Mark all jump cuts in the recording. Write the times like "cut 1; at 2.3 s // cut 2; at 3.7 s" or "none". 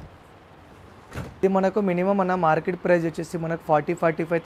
cut 1; at 1.4 s